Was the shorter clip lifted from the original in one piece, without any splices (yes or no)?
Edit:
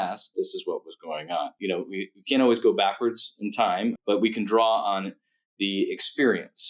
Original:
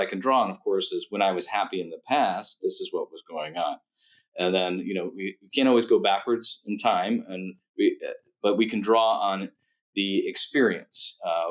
no